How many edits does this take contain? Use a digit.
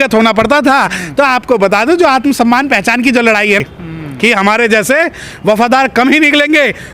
1